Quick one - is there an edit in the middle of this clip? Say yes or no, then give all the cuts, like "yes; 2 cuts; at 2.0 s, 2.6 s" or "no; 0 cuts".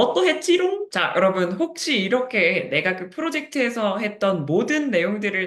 yes; 1 cut; at 0.9 s